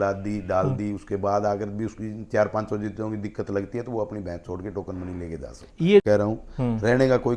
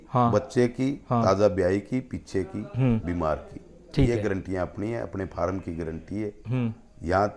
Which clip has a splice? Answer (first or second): first